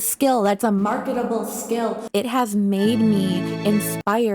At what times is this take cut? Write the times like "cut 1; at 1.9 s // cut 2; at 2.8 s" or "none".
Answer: cut 1; at 2.0 s